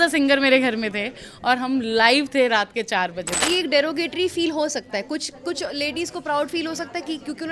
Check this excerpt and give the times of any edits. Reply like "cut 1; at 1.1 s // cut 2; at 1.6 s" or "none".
cut 1; at 3.4 s